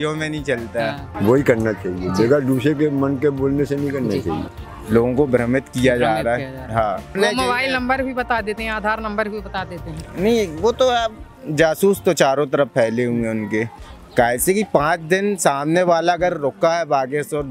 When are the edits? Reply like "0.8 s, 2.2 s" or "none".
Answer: 1.1 s, 4.4 s, 7.1 s, 13.8 s